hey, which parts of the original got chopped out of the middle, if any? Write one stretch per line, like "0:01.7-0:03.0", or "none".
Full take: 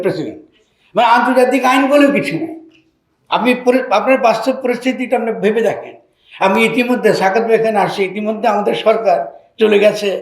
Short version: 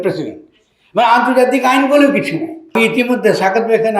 0:02.7-0:06.5